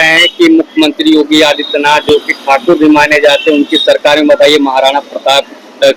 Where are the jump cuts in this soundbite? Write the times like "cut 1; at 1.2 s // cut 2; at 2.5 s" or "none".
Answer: none